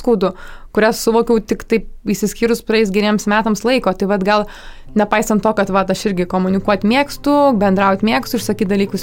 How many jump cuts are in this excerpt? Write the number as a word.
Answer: zero